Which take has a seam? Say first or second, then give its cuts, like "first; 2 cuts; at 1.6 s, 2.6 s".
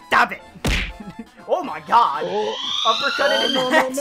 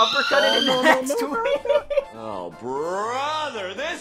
second; 1 cut; at 2.1 s